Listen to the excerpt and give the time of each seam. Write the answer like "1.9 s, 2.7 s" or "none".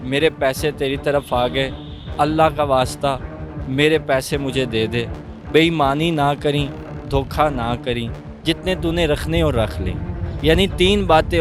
none